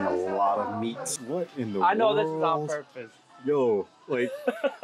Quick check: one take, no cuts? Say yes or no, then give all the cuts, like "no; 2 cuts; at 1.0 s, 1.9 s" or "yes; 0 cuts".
no; 1 cut; at 1.1 s